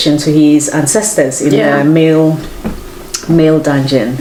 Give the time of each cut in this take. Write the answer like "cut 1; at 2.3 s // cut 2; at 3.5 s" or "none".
none